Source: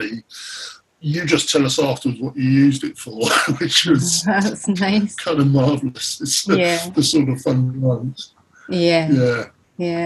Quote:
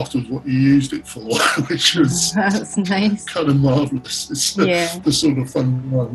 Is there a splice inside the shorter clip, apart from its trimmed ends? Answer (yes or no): no